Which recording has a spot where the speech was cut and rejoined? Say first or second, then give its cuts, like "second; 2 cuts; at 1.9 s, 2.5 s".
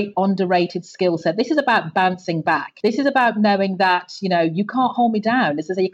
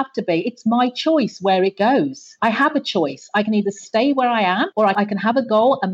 second; 2 cuts; at 2.2 s, 4.9 s